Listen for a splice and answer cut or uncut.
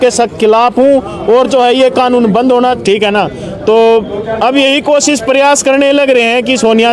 cut